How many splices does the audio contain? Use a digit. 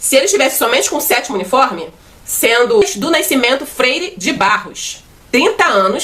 1